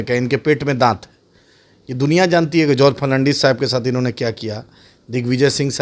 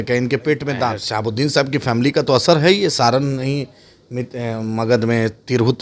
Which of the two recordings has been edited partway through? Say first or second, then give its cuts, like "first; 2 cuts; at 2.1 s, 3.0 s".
second; 1 cut; at 1.0 s